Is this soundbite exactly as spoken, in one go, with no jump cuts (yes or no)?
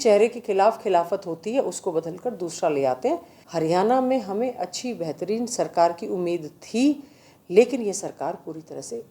no